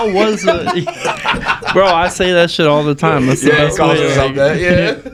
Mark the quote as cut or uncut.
uncut